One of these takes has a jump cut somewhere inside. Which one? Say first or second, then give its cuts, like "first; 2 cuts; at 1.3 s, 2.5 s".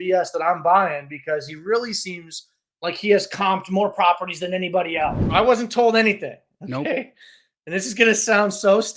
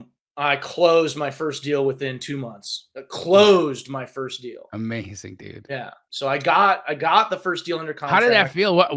first; 1 cut; at 5.2 s